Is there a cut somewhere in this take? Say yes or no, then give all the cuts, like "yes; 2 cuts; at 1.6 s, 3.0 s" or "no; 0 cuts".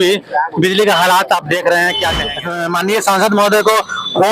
yes; 1 cut; at 2.6 s